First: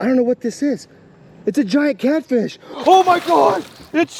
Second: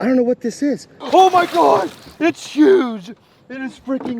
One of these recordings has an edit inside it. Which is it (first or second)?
second